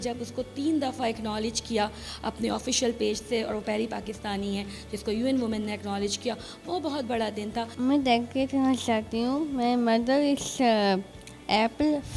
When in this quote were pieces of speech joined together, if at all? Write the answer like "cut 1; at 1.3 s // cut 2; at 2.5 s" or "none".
cut 1; at 7.7 s